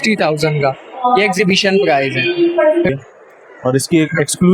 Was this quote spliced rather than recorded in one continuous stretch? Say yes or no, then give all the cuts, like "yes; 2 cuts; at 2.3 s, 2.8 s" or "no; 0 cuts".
yes; 1 cut; at 2.9 s